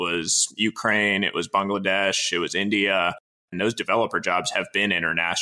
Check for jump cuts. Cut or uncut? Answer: cut